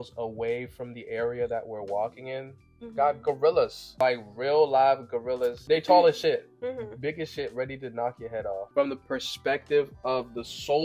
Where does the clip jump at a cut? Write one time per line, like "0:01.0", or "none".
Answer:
0:03.8
0:05.6
0:08.7